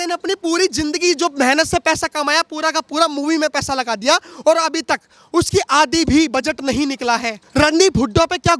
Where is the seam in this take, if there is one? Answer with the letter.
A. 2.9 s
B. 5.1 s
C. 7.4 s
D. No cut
C